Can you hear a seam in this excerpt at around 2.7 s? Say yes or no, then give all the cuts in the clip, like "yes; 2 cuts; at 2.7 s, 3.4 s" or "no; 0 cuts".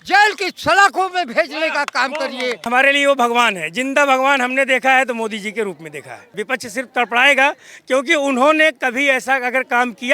yes; 2 cuts; at 2.7 s, 6.3 s